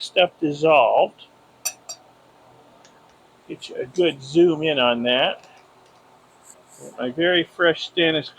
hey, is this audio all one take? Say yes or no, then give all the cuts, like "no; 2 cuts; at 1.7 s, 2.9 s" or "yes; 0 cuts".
no; 2 cuts; at 3.1 s, 6.5 s